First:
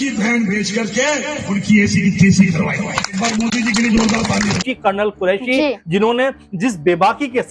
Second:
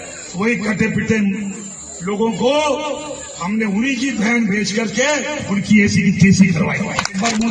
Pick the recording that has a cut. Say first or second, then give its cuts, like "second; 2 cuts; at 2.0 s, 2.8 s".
first; 1 cut; at 4.6 s